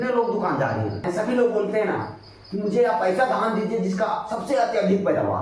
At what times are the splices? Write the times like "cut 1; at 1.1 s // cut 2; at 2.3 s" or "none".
cut 1; at 1.1 s